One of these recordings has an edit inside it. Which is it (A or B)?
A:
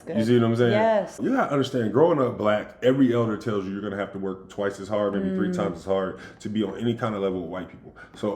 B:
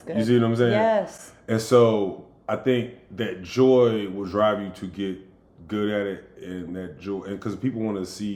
A